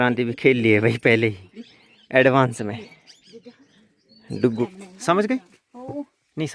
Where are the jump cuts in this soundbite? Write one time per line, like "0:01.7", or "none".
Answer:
0:04.7